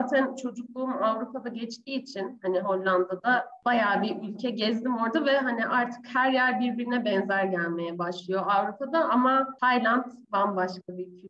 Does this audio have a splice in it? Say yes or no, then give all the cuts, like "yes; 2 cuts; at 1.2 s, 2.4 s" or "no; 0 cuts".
yes; 2 cuts; at 3.5 s, 9.5 s